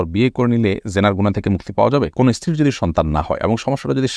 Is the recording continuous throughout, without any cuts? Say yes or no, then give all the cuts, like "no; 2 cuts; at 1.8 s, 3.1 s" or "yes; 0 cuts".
no; 1 cut; at 2.1 s